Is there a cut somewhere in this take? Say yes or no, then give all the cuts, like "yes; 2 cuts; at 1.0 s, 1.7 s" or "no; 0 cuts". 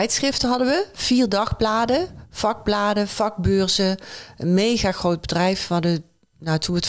no; 0 cuts